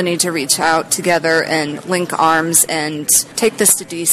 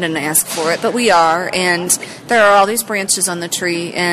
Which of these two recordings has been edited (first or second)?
first